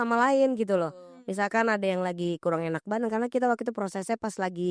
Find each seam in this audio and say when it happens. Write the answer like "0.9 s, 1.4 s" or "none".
none